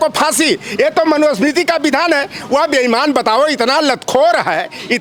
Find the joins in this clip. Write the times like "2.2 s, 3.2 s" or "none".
none